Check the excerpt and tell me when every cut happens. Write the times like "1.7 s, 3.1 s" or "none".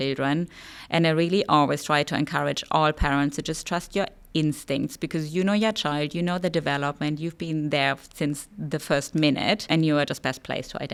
none